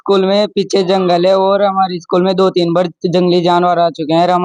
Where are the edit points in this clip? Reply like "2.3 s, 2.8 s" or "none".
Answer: none